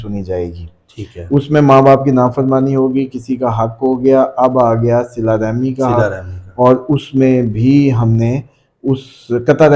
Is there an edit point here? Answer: no; 0 cuts

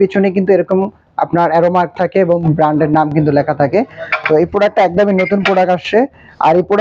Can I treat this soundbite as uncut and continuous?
yes; 0 cuts

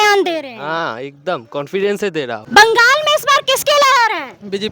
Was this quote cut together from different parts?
yes; 1 cut; at 2.4 s

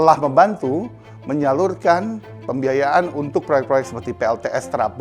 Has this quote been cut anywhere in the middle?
no; 0 cuts

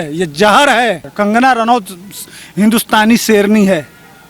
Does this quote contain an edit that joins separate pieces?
yes; 1 cut; at 1.1 s

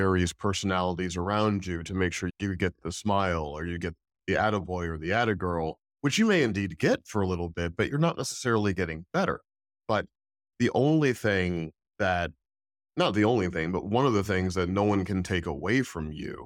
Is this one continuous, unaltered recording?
no; 1 cut; at 2.3 s

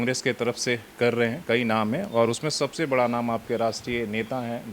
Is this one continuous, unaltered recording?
yes; 0 cuts

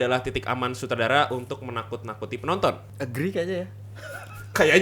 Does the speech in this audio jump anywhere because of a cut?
no; 0 cuts

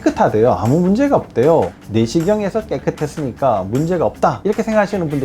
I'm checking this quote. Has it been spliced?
yes; 1 cut; at 1.7 s

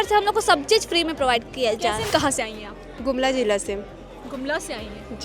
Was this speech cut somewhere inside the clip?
yes; 1 cut; at 2.1 s

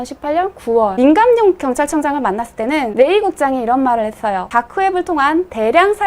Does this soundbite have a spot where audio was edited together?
yes; 3 cuts; at 0.9 s, 2.9 s, 4.4 s

